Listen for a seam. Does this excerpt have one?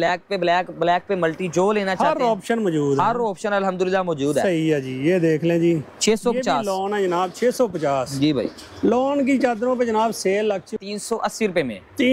yes; 1 cut; at 10.7 s

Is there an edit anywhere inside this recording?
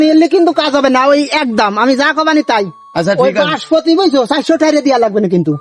no; 0 cuts

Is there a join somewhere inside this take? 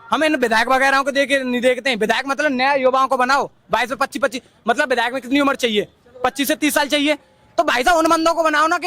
no; 0 cuts

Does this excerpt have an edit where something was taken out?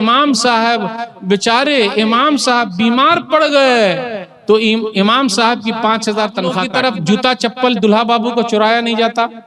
yes; 1 cut; at 6.6 s

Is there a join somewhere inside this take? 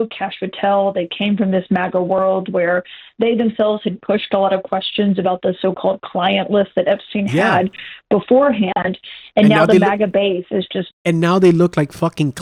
no; 0 cuts

